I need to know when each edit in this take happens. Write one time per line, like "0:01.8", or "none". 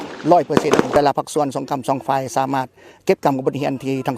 0:01.0